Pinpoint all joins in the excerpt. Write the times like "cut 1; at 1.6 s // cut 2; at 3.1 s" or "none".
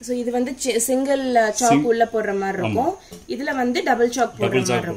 none